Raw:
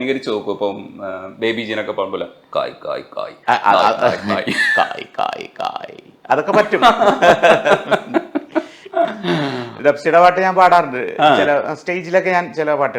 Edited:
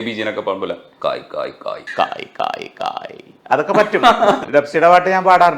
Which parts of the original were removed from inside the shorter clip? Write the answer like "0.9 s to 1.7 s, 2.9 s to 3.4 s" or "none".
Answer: 3.3 s to 4.6 s, 7.2 s to 9.7 s